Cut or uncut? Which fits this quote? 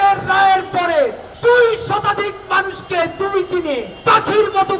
cut